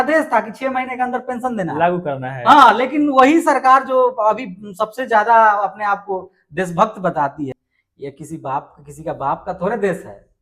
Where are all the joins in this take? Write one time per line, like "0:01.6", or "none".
0:07.5